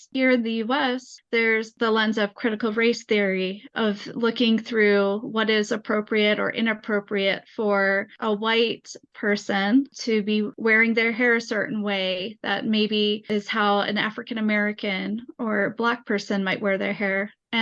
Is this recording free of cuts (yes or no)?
no